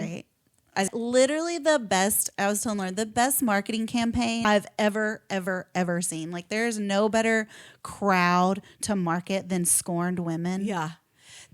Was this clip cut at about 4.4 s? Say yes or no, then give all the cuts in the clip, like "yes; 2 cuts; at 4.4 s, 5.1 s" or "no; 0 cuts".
yes; 2 cuts; at 0.9 s, 4.4 s